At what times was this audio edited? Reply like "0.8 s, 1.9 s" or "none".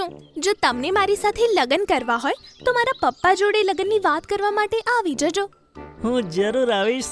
none